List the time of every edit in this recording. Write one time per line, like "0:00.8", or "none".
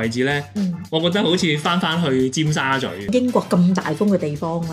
0:03.1